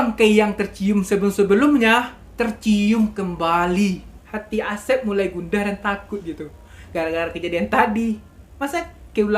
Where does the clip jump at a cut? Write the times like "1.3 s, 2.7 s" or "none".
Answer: 4.1 s

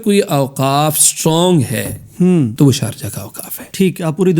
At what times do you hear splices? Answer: 2.5 s

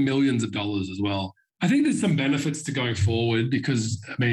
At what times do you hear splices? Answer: 1.3 s

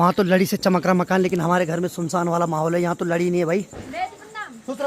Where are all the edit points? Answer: 3.7 s

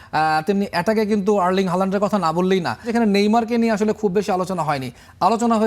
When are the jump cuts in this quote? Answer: 2.9 s

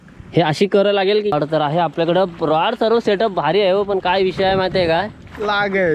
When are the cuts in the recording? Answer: 1.3 s

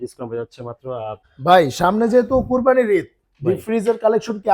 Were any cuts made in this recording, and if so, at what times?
1.3 s

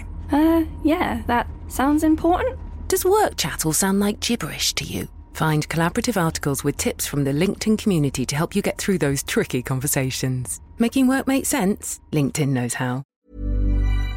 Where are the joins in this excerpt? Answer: 13.2 s

